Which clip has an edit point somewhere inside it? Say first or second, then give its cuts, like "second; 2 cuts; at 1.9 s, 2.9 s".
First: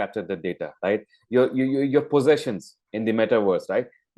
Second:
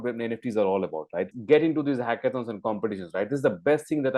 second; 1 cut; at 1.3 s